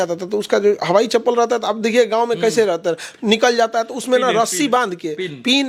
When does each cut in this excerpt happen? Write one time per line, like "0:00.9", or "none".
none